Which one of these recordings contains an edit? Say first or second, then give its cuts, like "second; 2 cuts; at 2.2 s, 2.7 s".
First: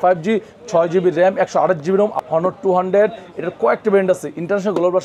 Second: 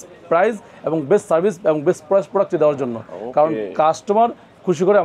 first; 1 cut; at 2.2 s